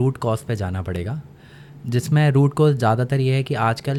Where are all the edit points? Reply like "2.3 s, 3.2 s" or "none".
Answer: none